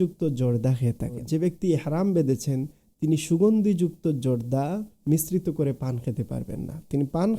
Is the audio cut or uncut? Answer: cut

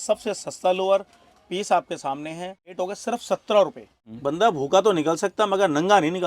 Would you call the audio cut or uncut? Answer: cut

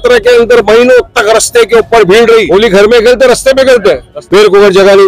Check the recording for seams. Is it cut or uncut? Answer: cut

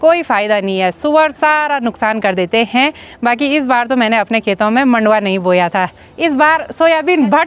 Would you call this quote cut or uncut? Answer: uncut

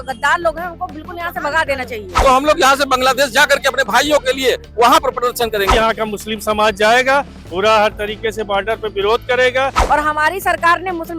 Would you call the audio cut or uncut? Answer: cut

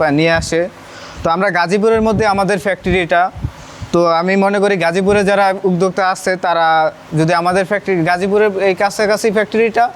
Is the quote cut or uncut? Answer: uncut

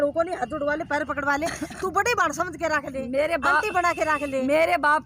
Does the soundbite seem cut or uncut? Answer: uncut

